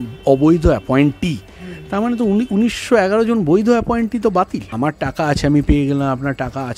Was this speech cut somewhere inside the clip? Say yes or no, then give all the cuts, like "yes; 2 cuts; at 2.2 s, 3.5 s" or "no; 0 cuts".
yes; 1 cut; at 4.6 s